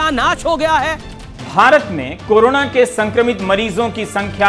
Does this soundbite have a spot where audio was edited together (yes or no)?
yes